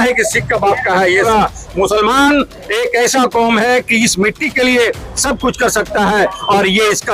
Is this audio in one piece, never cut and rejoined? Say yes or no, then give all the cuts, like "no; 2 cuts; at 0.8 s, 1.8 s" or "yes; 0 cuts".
no; 1 cut; at 1.3 s